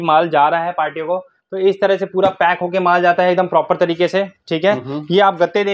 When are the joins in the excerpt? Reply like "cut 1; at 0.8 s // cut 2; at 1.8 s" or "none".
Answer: none